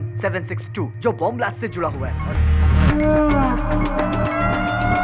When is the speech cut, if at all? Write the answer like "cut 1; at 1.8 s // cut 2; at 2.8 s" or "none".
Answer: cut 1; at 2.1 s